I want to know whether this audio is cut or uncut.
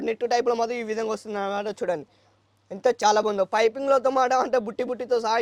uncut